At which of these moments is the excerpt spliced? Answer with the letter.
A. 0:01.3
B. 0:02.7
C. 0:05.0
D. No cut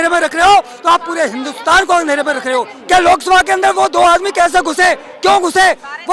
B